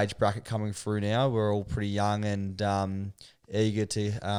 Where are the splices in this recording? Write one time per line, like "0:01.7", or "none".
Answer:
none